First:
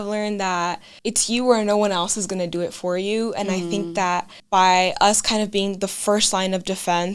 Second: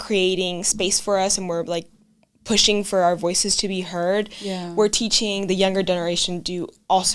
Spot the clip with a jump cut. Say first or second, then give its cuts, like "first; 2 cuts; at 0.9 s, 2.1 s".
first; 2 cuts; at 0.9 s, 4.4 s